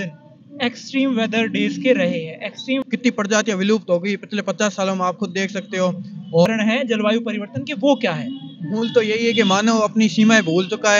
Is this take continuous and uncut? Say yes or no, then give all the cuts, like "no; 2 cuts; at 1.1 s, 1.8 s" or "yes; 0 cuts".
no; 2 cuts; at 2.8 s, 6.5 s